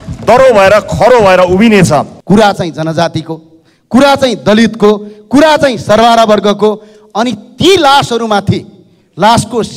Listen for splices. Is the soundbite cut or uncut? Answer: cut